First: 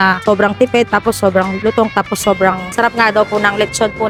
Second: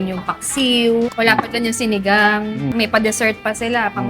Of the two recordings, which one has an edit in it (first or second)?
second